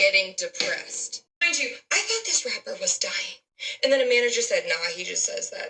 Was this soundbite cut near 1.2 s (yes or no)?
yes